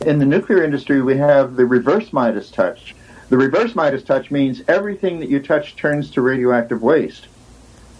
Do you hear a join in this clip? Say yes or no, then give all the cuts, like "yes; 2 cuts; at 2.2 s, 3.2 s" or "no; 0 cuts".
yes; 1 cut; at 2.8 s